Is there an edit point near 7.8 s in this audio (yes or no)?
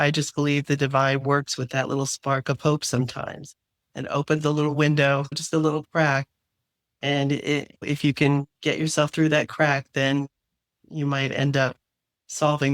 yes